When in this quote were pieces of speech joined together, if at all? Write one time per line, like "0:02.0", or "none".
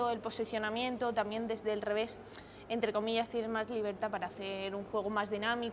none

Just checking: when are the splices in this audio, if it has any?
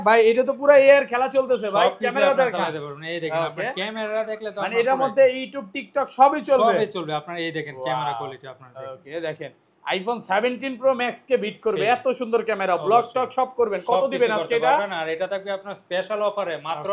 none

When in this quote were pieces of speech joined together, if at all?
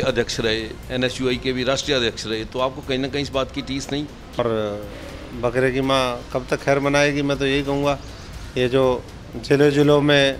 0:04.4

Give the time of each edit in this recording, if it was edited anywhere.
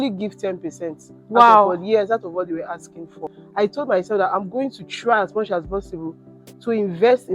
0:03.4

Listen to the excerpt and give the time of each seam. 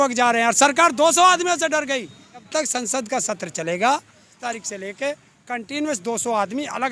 0:02.4
0:04.4

